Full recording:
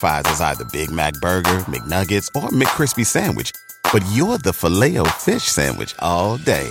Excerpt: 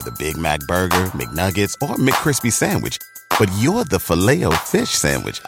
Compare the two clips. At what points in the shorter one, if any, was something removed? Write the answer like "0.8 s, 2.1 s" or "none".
none